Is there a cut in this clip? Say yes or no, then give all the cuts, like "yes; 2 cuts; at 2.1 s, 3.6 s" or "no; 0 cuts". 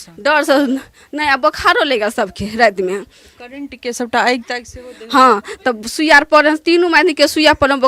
no; 0 cuts